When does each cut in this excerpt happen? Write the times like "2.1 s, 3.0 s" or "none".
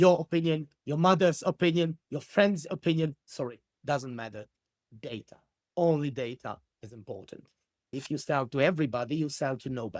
7.8 s